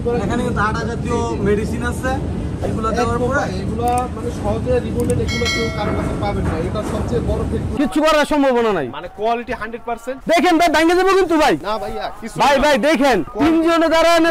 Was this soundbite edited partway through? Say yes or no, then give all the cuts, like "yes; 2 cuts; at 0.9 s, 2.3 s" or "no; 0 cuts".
yes; 1 cut; at 7.7 s